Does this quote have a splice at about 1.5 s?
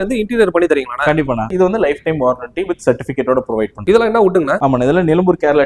yes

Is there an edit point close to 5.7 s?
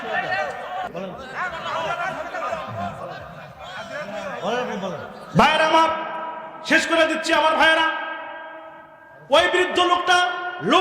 no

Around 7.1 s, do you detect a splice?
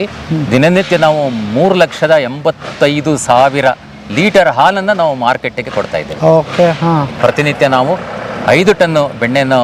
yes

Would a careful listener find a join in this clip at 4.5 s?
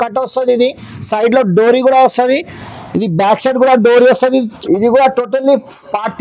yes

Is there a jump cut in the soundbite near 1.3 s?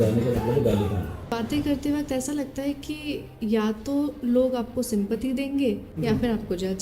yes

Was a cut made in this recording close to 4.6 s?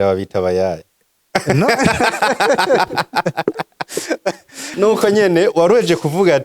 yes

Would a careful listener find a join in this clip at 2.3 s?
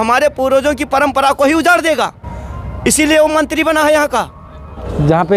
no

